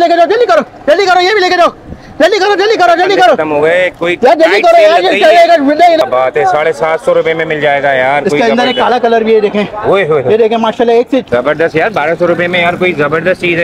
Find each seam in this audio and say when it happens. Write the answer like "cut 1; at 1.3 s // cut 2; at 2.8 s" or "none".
cut 1; at 6.0 s // cut 2; at 11.2 s